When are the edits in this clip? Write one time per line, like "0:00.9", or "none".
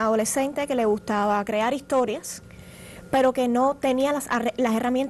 none